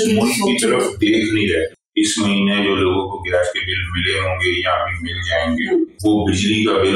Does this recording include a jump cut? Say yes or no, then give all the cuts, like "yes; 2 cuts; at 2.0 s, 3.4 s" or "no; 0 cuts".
yes; 2 cuts; at 1.8 s, 5.9 s